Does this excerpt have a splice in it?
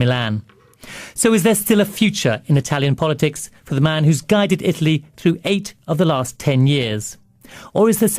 yes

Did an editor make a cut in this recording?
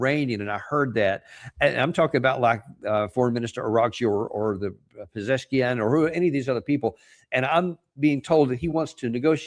no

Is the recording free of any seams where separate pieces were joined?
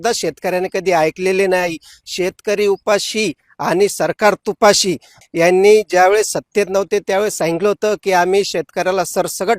no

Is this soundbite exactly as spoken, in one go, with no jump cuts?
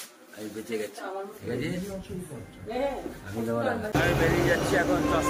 no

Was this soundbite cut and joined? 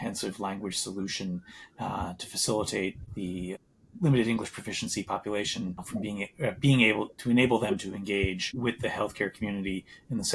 no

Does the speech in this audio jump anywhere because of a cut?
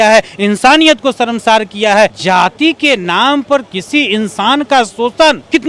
no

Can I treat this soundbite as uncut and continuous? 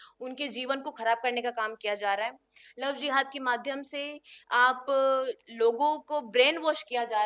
yes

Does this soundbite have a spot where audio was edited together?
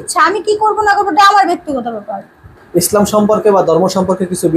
yes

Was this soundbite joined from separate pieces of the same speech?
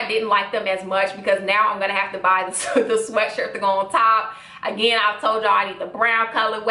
no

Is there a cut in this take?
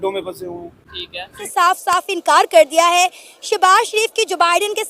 yes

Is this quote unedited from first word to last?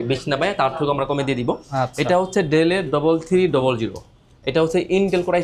yes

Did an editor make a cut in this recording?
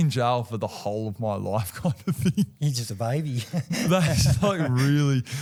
no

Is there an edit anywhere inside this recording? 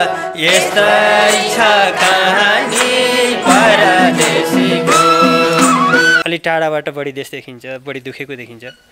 yes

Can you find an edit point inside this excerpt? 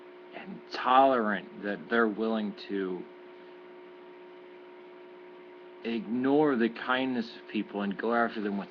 yes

